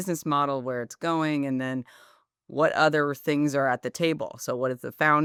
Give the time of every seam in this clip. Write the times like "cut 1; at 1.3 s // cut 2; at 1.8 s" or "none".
none